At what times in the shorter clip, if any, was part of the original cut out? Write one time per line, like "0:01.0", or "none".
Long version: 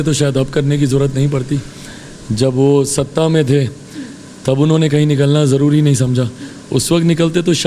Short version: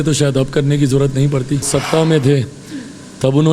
0:01.7